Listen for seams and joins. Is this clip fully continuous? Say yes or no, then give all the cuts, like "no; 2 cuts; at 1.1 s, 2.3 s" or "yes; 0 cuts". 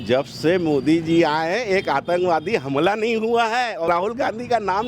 no; 1 cut; at 3.9 s